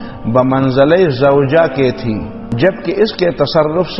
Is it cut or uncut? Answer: cut